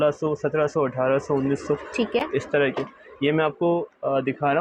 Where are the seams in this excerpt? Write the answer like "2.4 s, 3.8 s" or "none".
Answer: none

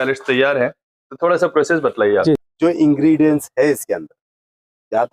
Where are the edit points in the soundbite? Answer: 2.4 s

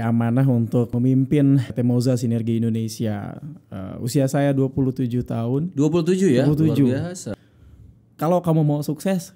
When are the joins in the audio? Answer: 0.9 s, 1.7 s, 7.3 s

